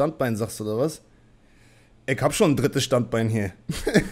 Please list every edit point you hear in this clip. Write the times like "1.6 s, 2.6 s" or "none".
none